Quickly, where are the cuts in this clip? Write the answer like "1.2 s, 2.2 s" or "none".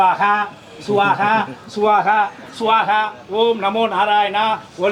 none